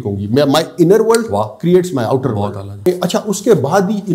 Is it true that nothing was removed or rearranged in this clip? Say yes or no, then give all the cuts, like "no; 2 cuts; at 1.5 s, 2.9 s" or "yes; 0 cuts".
no; 1 cut; at 2.9 s